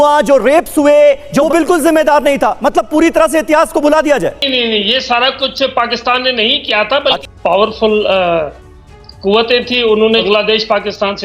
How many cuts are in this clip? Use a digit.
4